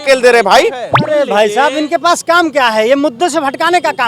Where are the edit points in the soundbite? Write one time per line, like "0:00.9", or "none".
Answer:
0:00.9